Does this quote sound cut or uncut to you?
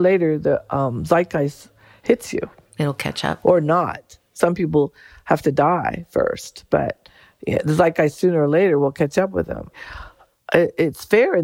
uncut